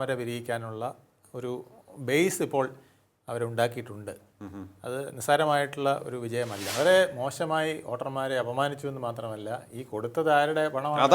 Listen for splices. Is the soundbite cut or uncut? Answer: cut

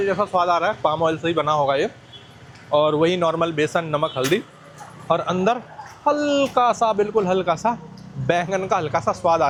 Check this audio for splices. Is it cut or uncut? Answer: uncut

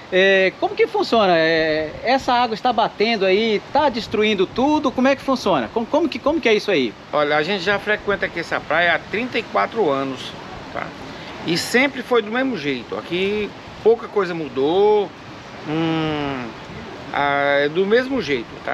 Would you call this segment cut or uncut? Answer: uncut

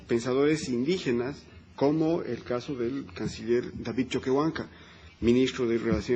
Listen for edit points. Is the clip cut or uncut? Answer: cut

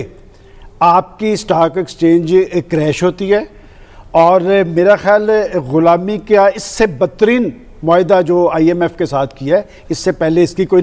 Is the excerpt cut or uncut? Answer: uncut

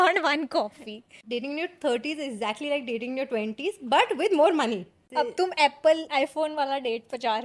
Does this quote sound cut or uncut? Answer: cut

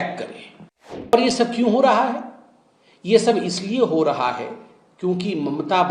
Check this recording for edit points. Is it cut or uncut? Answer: cut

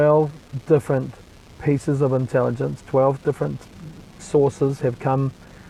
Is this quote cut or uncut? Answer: uncut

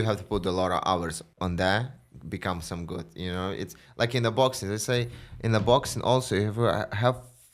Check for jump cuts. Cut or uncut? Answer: cut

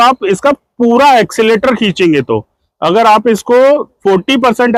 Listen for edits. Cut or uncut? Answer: uncut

